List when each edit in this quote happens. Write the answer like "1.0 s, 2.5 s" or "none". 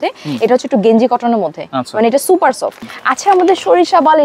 2.8 s